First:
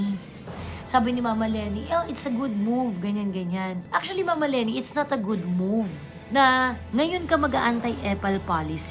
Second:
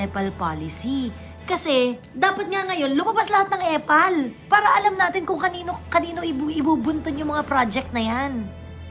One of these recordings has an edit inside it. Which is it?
first; 1 cut; at 6.8 s

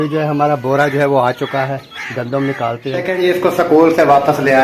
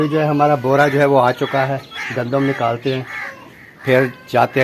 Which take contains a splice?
first; 1 cut; at 2.9 s

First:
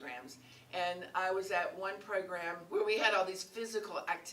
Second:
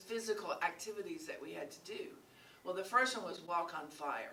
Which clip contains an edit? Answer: first; 1 cut; at 2.6 s

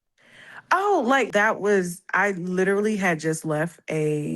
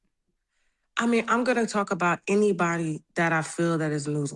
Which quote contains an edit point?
first; 1 cut; at 1.3 s

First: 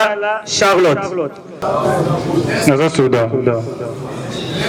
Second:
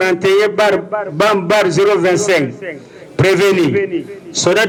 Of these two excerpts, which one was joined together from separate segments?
first; 1 cut; at 1.6 s

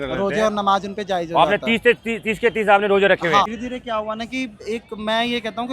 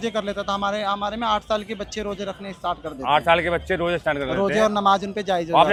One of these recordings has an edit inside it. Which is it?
first; 1 cut; at 3.5 s

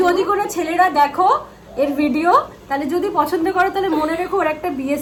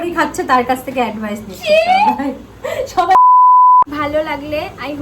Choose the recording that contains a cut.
second; 2 cuts; at 3.1 s, 3.9 s

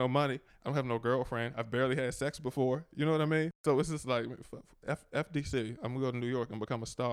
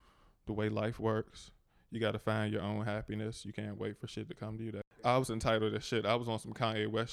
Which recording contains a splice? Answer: second; 1 cut; at 5.0 s

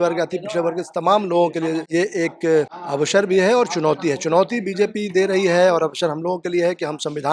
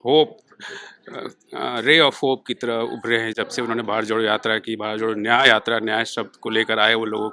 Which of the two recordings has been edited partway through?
first; 2 cuts; at 1.8 s, 2.8 s

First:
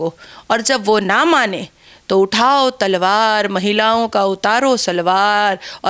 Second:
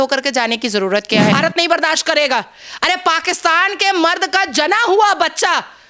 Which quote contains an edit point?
second; 1 cut; at 1.3 s

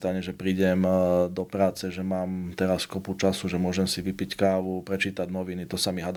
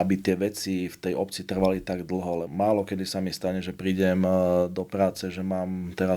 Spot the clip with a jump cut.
second; 1 cut; at 2.5 s

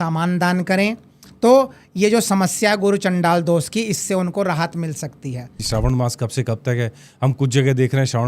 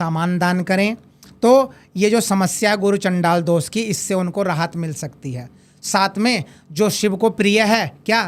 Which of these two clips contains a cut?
first; 1 cut; at 5.6 s

